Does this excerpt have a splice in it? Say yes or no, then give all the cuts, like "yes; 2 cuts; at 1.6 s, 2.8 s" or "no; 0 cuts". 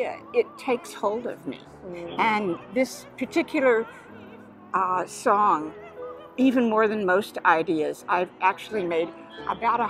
no; 0 cuts